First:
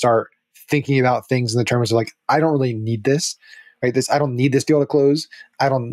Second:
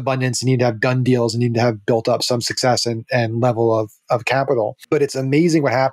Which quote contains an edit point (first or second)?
second